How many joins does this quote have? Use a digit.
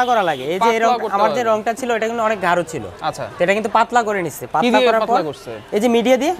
0